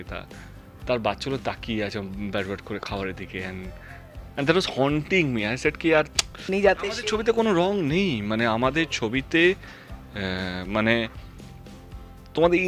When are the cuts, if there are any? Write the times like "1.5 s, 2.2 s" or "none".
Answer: 6.4 s